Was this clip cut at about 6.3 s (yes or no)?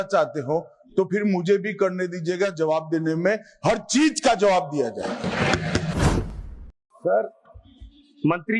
yes